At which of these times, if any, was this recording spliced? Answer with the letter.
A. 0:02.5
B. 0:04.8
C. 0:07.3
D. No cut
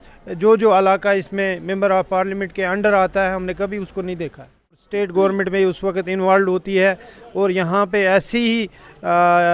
B